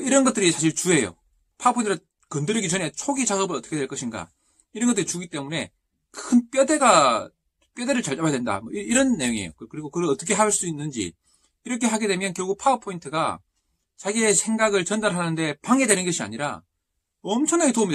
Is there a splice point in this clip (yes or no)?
yes